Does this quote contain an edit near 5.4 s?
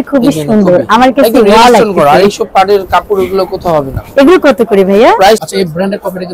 yes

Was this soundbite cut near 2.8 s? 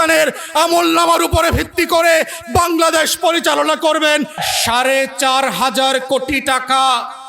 no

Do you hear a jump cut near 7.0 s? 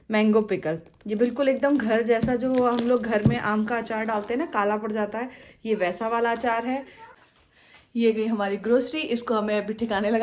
yes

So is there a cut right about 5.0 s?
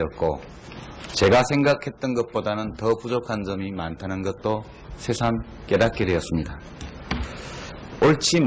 no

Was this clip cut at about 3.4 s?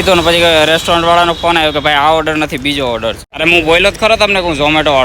yes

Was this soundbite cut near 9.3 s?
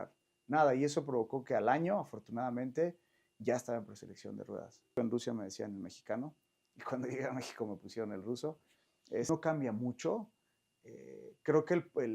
yes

